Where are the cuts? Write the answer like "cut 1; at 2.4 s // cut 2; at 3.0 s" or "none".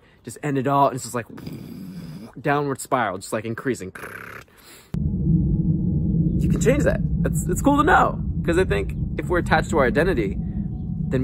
cut 1; at 5.0 s